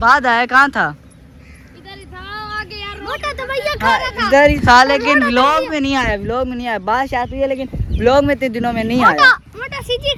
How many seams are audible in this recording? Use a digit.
0